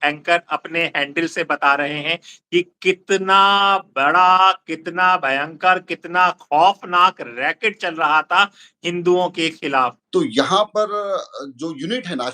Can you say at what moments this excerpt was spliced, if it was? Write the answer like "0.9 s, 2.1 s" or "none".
10.0 s

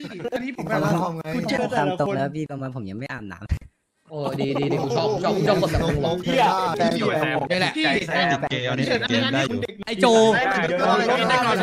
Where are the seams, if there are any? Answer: 9.8 s

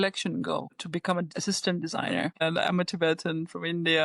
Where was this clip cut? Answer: 1.3 s, 2.3 s

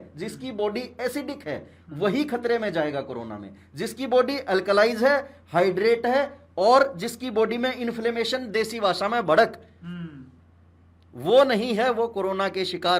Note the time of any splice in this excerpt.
none

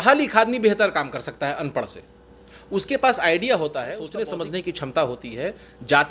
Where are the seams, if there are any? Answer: 4.0 s

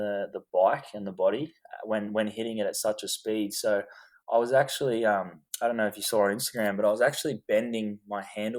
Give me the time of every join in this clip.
none

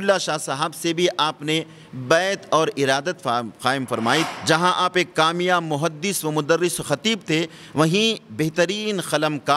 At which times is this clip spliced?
4.3 s

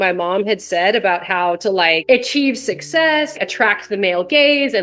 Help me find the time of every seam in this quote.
2.0 s, 3.3 s

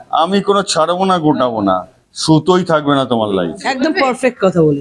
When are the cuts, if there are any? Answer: 3.8 s

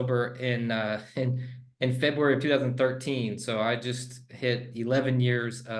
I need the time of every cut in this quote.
none

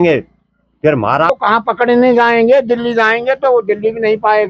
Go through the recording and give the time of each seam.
1.3 s

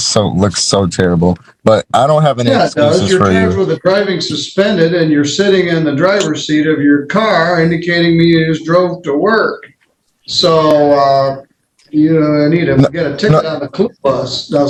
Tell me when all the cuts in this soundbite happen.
none

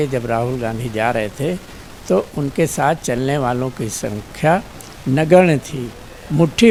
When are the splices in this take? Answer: none

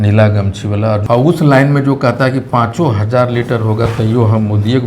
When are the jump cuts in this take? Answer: 1.0 s

